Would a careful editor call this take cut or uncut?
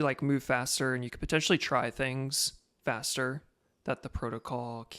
uncut